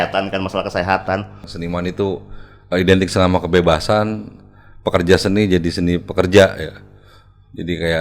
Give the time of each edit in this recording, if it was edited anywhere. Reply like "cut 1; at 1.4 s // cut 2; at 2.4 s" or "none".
cut 1; at 1.4 s